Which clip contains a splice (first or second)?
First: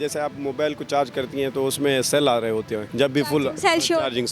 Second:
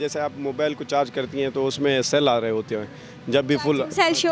first